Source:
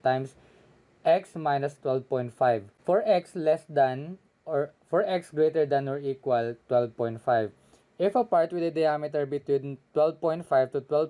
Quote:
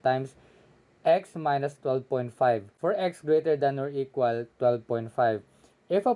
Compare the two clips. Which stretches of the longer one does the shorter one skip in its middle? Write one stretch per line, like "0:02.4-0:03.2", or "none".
0:02.7-0:04.8